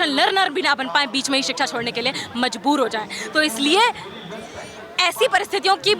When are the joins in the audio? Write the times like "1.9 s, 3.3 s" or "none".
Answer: none